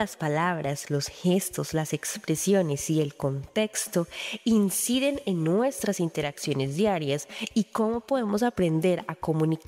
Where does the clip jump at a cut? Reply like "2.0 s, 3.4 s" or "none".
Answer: none

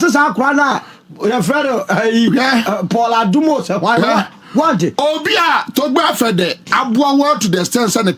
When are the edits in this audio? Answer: 4.0 s

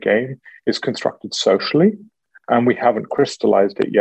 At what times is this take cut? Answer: none

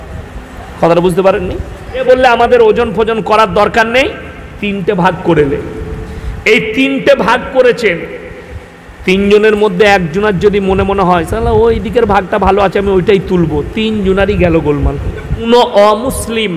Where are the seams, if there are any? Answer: 2.0 s, 15.4 s

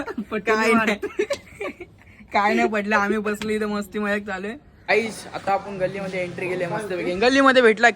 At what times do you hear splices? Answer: 4.8 s

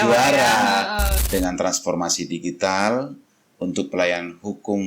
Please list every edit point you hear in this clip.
1.1 s

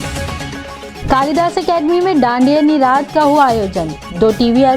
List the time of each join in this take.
0.9 s

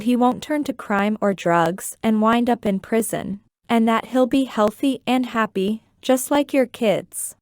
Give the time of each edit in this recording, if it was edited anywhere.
3.7 s, 4.4 s

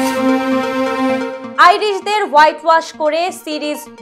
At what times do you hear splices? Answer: 1.4 s

